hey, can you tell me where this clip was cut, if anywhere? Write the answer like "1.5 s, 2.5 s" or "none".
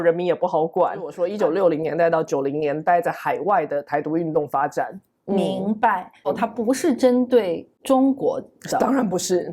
1.2 s, 6.3 s, 7.7 s